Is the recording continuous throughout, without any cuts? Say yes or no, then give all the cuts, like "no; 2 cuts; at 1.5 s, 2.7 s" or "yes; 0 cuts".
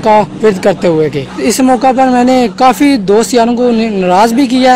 no; 2 cuts; at 1.3 s, 2.5 s